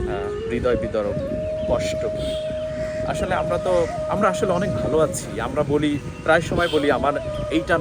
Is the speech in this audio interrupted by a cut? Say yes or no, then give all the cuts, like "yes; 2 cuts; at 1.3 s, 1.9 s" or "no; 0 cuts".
no; 0 cuts